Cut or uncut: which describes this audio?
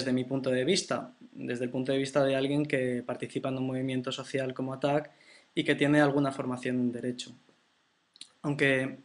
cut